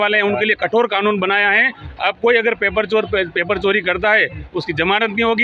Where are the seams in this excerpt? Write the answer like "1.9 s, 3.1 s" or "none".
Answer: none